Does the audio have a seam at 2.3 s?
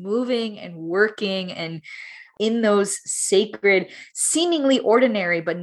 yes; 1 cut; at 2.3 s

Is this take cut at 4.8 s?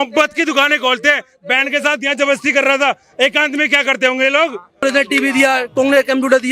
yes; 1 cut; at 4.8 s

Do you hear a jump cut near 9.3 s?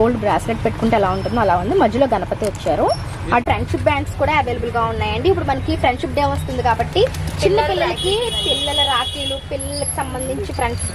no; 1 cut; at 3.4 s

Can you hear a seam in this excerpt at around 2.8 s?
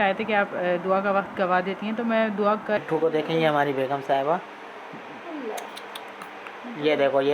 yes; 1 cut; at 2.8 s

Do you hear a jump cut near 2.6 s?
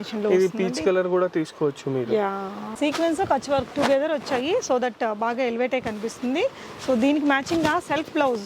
yes; 1 cut; at 2.6 s

